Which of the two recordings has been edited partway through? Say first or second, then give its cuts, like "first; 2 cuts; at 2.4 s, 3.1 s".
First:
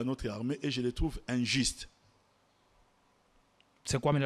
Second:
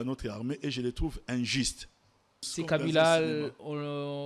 second; 1 cut; at 2.4 s